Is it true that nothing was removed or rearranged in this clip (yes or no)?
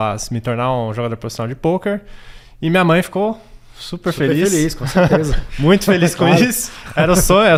yes